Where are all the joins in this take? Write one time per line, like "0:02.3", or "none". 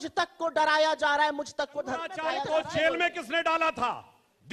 0:02.2